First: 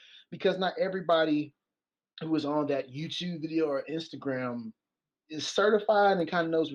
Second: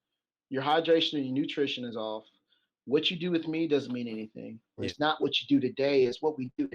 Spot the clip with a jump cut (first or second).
second